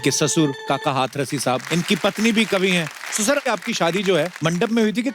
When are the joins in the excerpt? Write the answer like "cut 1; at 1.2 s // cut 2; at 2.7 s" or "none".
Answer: cut 1; at 1.6 s // cut 2; at 3.4 s // cut 3; at 4.3 s